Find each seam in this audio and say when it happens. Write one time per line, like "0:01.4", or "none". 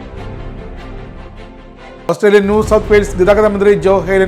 0:02.0